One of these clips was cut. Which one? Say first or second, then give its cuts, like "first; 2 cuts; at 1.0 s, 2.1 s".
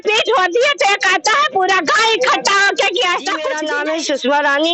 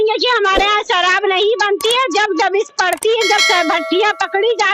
first; 1 cut; at 3.6 s